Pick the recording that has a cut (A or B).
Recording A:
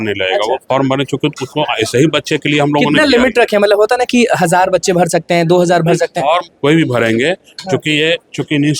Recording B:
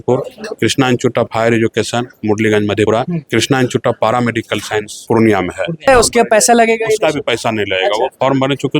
B